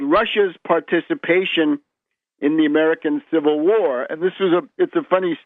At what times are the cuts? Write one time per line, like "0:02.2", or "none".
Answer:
0:02.1